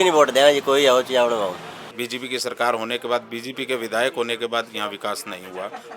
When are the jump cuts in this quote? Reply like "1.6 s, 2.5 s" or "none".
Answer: 1.6 s

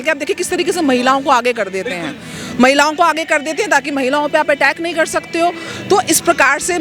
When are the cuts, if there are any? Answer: none

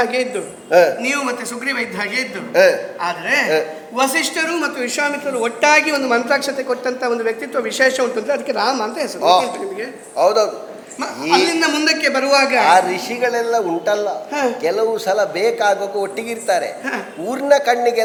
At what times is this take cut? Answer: none

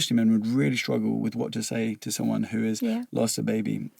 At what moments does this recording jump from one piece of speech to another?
none

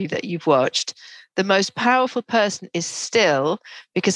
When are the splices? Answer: none

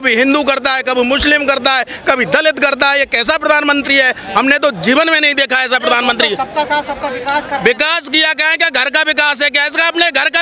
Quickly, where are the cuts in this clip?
none

